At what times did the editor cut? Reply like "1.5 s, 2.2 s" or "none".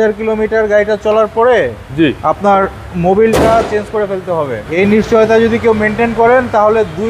4.6 s

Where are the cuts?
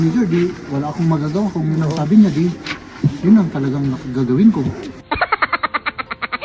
4.9 s

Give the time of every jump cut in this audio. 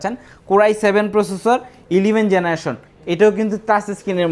none

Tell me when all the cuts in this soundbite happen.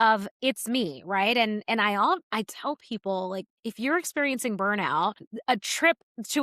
3.5 s, 5.3 s

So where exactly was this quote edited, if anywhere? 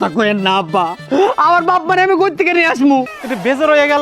3.1 s

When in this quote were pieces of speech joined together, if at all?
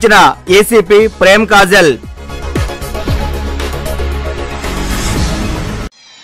none

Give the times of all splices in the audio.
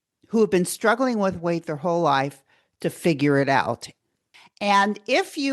4.0 s

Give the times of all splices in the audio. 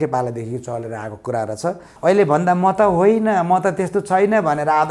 1.9 s

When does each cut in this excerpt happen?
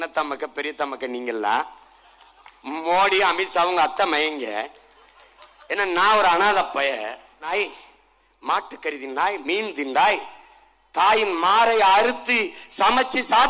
7.5 s

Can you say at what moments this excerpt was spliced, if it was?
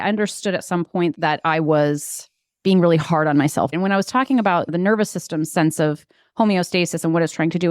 3.7 s, 4.7 s

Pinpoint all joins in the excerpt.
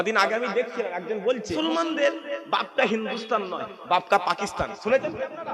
1.6 s

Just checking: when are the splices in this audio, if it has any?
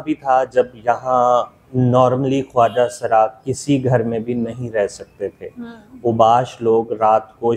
none

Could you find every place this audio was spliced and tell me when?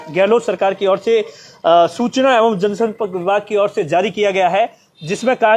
none

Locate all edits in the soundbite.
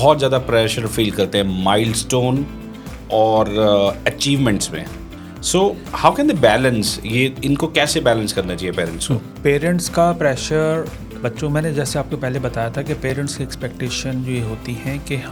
none

